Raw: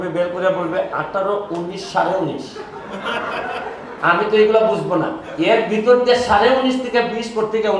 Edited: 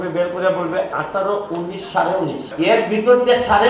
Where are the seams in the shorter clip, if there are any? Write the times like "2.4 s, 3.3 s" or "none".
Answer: 2.4 s